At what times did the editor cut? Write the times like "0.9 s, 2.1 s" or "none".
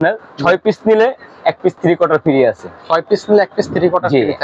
none